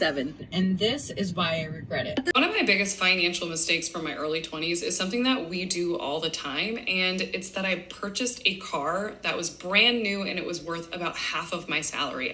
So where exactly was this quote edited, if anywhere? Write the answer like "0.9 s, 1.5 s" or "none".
2.3 s